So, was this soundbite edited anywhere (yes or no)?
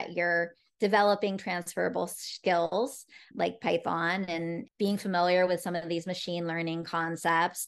yes